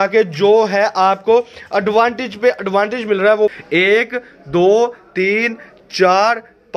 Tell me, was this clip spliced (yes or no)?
yes